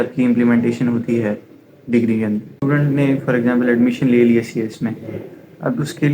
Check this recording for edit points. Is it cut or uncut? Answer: cut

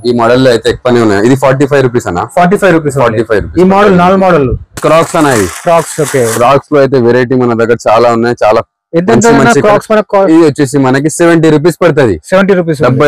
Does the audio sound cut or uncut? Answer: cut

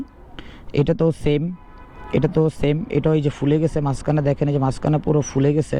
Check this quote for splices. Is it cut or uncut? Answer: uncut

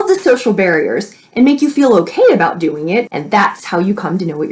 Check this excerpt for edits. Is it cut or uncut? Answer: cut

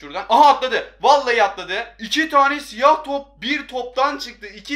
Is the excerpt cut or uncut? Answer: cut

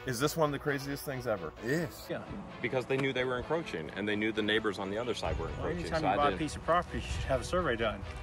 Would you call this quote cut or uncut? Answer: cut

